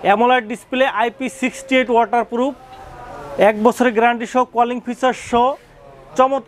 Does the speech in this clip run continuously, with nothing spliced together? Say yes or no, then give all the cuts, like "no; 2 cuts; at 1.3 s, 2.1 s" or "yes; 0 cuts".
yes; 0 cuts